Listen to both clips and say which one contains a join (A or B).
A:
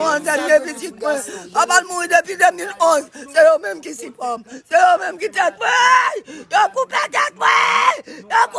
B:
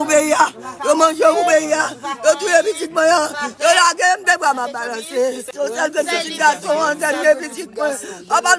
B